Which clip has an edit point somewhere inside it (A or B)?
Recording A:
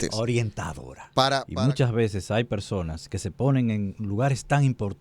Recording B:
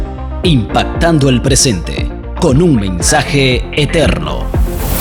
A